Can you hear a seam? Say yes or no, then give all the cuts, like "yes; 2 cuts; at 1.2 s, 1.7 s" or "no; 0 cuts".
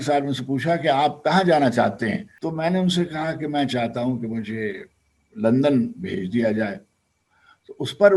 yes; 1 cut; at 2.3 s